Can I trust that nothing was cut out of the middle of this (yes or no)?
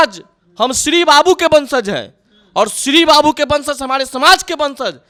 yes